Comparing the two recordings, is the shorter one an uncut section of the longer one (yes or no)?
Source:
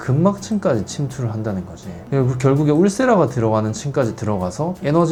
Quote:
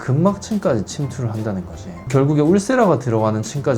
no